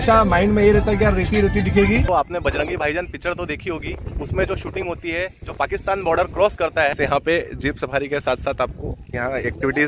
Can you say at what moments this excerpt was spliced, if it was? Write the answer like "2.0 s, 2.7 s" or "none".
2.0 s, 6.9 s